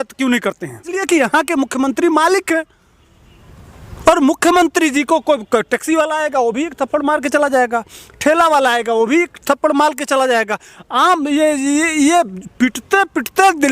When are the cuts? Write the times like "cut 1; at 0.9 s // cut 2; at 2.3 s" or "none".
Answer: cut 1; at 1.0 s